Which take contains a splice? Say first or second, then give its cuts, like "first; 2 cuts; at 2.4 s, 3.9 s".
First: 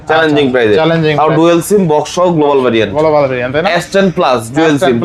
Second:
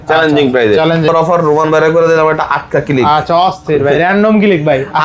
second; 1 cut; at 1.1 s